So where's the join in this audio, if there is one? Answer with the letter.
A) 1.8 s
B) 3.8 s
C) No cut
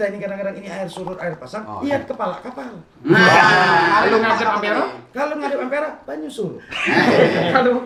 C